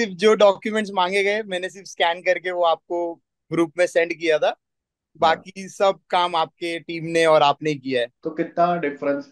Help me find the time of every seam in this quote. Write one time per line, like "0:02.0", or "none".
0:08.2